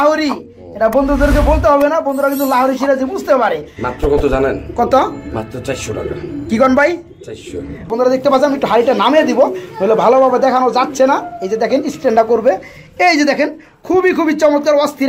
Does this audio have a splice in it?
yes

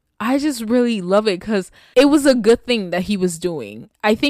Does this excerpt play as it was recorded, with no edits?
no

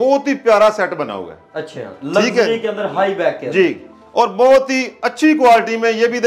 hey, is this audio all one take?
yes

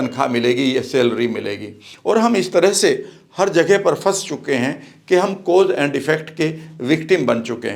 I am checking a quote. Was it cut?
no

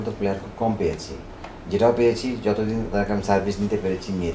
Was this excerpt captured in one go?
yes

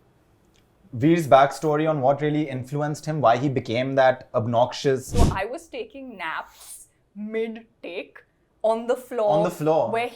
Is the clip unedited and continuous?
no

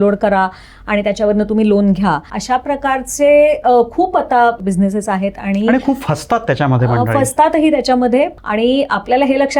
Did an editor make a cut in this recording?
yes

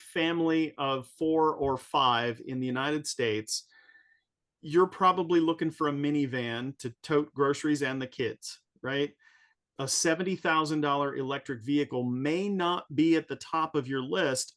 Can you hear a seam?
no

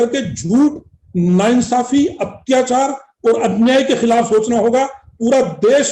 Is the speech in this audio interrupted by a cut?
no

